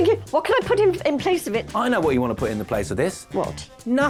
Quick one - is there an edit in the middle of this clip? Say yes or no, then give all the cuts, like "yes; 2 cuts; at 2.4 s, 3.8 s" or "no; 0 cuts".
no; 0 cuts